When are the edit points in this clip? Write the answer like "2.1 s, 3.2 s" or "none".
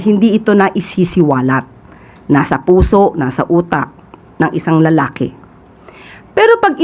none